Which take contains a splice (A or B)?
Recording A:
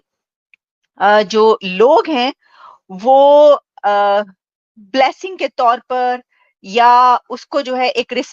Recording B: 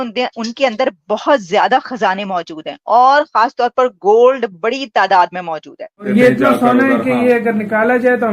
B